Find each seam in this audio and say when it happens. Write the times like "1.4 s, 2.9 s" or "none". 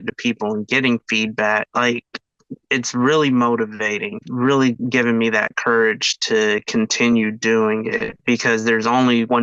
4.1 s, 4.8 s